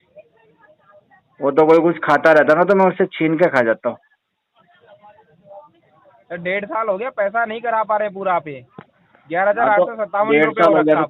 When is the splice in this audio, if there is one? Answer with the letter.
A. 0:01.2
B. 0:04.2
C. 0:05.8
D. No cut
D